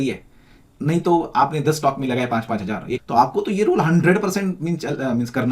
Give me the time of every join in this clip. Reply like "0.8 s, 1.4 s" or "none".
3.0 s